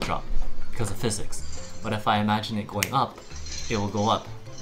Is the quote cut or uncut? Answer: uncut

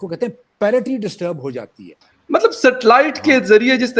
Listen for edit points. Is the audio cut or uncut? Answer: uncut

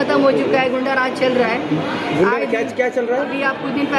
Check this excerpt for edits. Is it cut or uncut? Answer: uncut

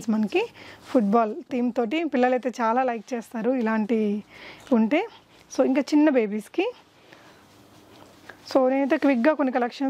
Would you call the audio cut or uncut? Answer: uncut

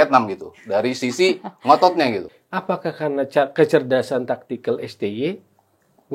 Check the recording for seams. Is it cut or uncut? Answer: cut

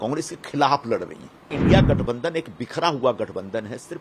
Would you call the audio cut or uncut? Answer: cut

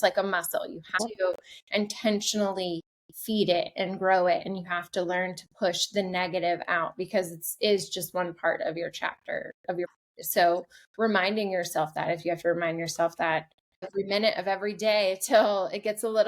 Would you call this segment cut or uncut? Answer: cut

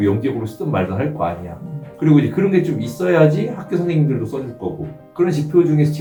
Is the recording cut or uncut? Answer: uncut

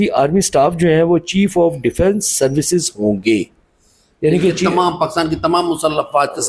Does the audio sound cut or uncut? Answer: uncut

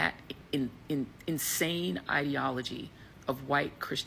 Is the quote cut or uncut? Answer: uncut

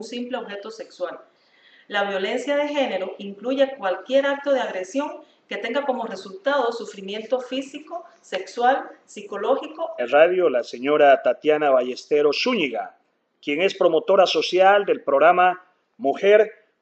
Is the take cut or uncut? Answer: uncut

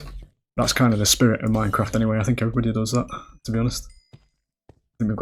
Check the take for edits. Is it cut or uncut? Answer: uncut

